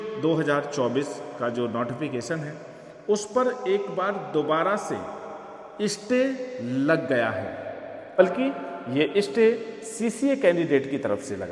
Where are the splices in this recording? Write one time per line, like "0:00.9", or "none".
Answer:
0:08.2